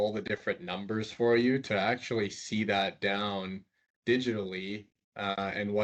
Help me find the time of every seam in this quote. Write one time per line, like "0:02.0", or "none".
none